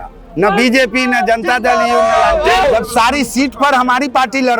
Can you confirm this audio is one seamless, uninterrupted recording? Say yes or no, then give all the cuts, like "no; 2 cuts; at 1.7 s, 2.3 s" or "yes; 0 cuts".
no; 1 cut; at 2.6 s